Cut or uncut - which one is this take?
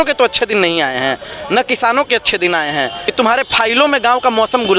cut